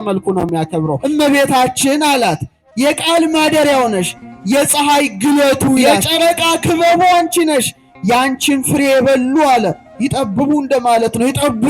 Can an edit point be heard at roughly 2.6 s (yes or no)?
no